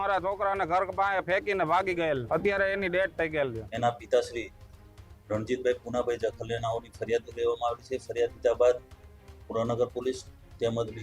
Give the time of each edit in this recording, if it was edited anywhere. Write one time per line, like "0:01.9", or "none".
0:02.2
0:03.6